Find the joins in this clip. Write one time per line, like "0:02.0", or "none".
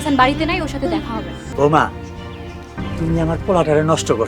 0:01.4